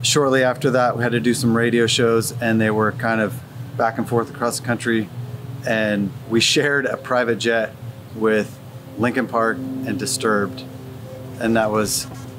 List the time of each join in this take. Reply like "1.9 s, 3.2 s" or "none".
1.0 s